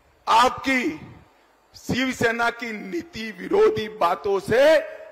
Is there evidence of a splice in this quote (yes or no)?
no